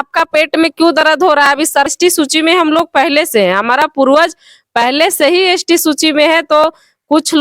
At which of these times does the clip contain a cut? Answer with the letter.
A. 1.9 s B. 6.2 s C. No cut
A